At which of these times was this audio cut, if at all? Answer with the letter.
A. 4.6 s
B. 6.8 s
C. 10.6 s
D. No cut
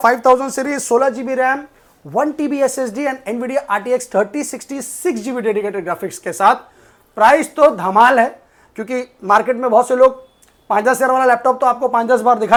D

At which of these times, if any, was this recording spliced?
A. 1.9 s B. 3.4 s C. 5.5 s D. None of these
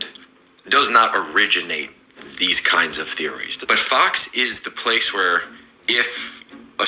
B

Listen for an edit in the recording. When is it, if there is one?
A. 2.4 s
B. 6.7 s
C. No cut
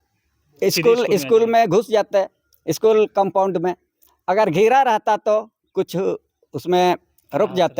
C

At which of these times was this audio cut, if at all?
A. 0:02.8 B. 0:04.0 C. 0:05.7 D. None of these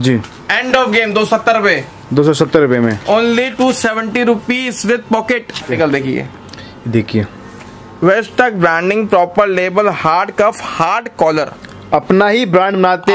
C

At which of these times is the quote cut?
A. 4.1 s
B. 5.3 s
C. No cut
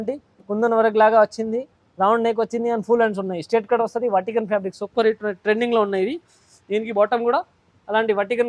C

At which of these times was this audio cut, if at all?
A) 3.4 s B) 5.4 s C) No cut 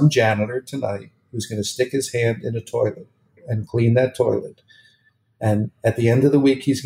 A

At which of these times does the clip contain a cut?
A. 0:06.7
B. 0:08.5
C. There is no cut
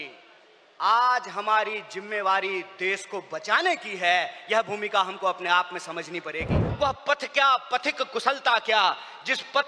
A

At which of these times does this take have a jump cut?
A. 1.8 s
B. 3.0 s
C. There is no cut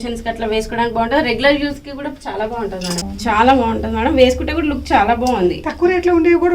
B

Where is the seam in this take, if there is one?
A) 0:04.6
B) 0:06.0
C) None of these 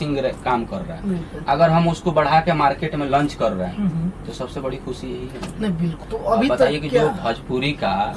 B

